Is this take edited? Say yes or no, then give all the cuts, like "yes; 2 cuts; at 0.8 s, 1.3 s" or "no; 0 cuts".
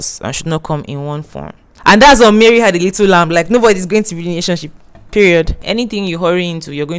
yes; 2 cuts; at 1.6 s, 5.6 s